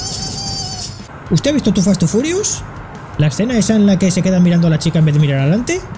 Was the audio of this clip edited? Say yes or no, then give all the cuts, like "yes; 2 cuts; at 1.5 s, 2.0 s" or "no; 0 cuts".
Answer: yes; 1 cut; at 1.0 s